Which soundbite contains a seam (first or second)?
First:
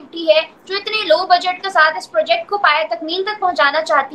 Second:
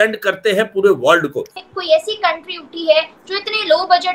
second